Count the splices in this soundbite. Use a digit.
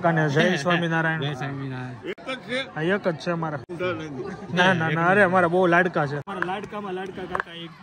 2